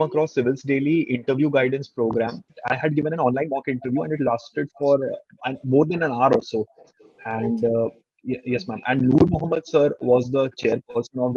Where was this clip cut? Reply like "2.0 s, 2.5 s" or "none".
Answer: 2.4 s